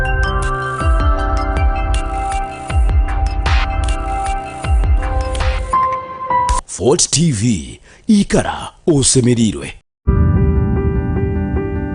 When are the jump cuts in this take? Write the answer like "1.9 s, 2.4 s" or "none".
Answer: 10.1 s